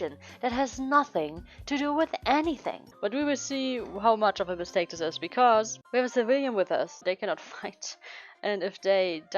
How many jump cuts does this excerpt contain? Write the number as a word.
three